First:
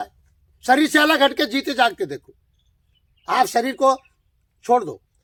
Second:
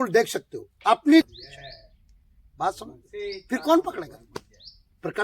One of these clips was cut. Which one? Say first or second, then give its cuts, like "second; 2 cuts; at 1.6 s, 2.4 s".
second; 1 cut; at 1.4 s